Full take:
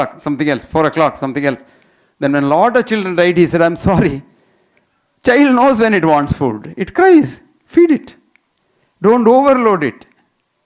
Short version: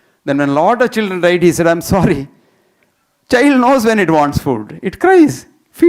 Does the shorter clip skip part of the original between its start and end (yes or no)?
no